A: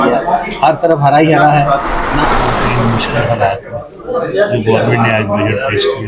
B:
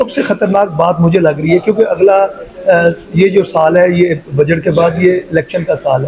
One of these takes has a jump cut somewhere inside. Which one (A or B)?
A